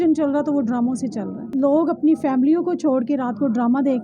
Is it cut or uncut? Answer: cut